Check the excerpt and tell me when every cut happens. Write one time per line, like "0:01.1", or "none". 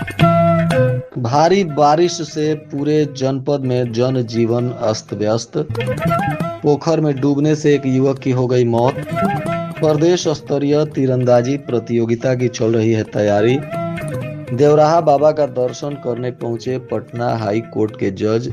0:01.1